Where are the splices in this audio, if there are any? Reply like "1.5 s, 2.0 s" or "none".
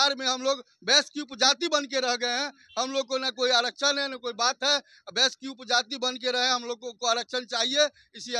none